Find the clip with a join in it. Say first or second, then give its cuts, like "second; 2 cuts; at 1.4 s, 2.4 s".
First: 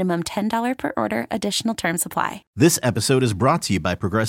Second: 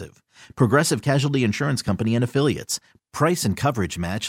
first; 1 cut; at 2.4 s